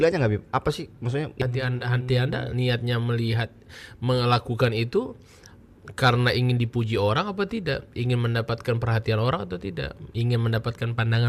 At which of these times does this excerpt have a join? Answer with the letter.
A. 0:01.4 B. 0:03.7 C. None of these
A